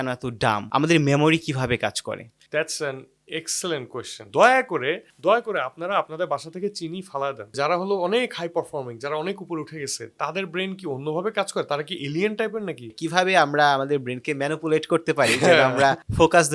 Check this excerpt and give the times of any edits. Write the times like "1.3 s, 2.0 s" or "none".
4.3 s, 7.5 s, 13.0 s